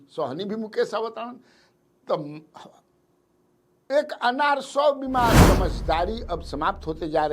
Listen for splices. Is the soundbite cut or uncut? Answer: cut